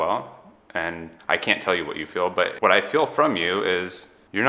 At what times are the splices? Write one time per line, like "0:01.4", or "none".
0:01.1